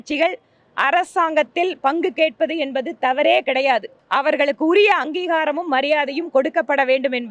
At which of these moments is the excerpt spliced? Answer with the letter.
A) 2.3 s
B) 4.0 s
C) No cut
B